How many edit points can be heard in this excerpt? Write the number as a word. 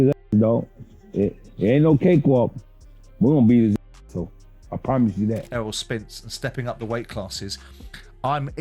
one